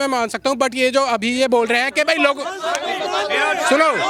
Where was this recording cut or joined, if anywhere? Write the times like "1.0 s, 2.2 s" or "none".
none

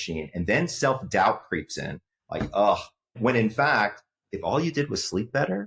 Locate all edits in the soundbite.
3.2 s

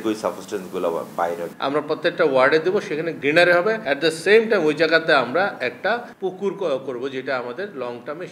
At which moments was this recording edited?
1.5 s, 3.1 s, 3.8 s, 6.1 s

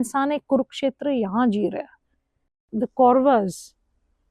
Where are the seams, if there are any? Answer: 2.5 s

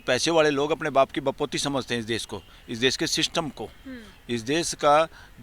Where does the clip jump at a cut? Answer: none

